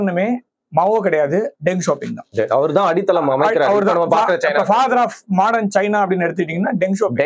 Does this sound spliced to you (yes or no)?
no